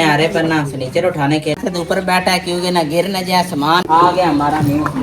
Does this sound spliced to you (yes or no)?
yes